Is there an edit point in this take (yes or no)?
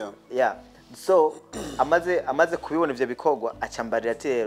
no